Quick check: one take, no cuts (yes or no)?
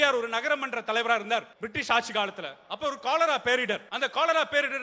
no